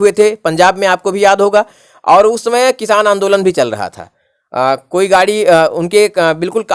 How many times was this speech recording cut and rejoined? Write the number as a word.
zero